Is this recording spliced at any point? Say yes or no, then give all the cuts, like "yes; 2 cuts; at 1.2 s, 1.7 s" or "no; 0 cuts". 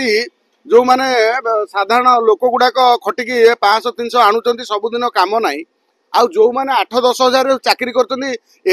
no; 0 cuts